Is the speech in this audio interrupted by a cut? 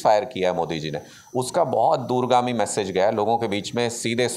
no; 0 cuts

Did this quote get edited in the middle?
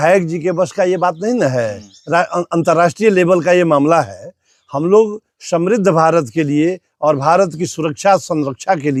no; 0 cuts

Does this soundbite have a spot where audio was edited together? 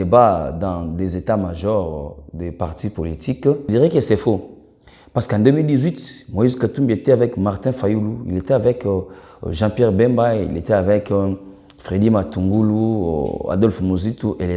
yes; 1 cut; at 3.6 s

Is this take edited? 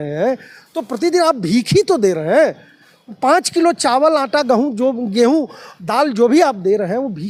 no; 0 cuts

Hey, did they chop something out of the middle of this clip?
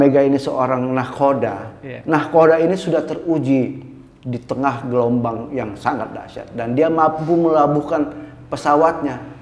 no; 0 cuts

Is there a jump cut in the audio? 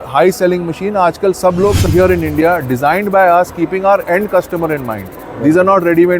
yes; 1 cut; at 1.9 s

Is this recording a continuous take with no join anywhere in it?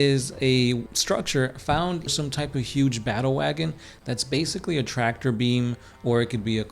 no; 2 cuts; at 0.9 s, 2.1 s

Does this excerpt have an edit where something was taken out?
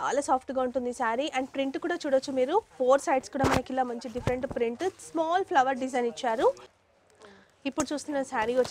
yes; 1 cut; at 6.6 s

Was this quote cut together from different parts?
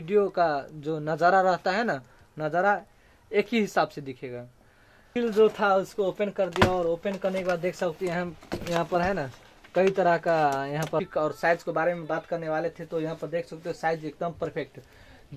yes; 2 cuts; at 5.1 s, 11.1 s

